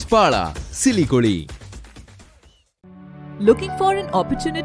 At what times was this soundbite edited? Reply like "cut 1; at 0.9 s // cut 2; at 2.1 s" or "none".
none

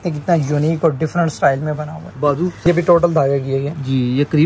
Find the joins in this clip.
cut 1; at 2.6 s

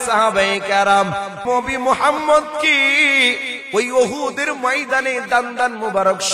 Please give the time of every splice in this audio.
cut 1; at 1.4 s

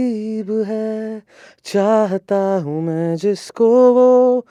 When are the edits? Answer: none

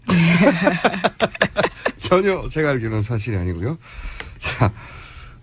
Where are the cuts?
cut 1; at 4.3 s

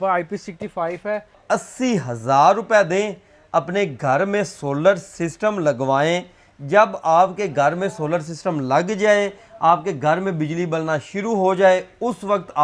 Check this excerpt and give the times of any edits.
cut 1; at 1.4 s

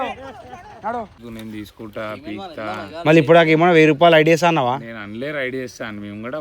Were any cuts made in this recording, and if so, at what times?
cut 1; at 1.2 s

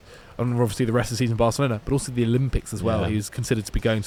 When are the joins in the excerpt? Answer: none

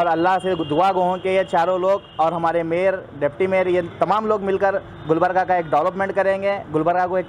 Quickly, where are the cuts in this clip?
none

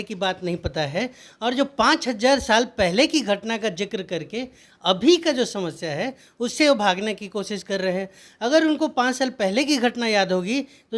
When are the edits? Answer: none

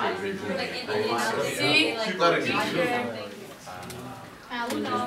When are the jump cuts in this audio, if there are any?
cut 1; at 3.2 s

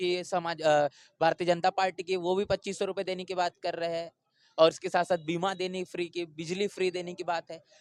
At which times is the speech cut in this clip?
none

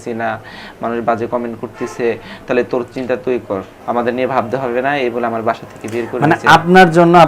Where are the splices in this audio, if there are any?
cut 1; at 3.7 s

